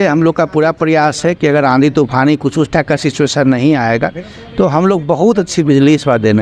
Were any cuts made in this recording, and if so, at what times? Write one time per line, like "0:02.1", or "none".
none